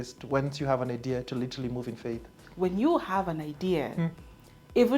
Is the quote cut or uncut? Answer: cut